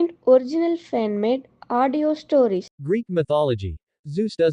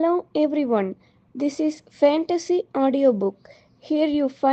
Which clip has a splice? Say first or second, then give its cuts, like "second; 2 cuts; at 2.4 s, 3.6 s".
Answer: first; 1 cut; at 2.7 s